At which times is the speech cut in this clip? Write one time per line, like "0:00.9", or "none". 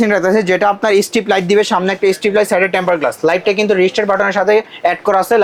none